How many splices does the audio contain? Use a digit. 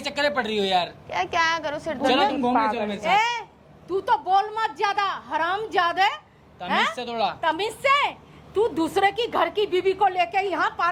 0